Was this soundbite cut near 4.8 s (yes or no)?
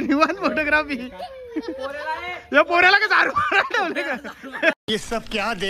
yes